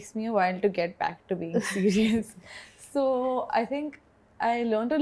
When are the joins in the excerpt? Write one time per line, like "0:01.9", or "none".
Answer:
none